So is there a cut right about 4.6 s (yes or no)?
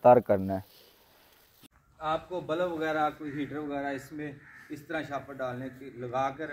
no